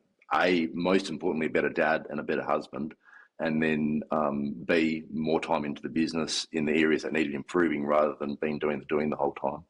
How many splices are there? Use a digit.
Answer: 0